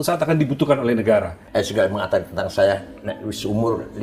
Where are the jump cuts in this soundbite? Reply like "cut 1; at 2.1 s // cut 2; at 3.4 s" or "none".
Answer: cut 1; at 1.4 s